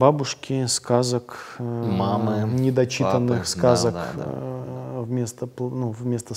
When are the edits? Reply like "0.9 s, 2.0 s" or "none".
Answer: none